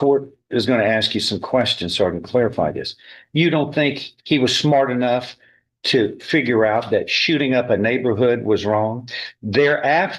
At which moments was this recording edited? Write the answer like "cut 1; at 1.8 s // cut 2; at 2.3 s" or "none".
none